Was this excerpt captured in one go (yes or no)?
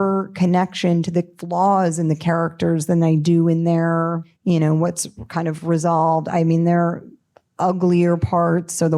no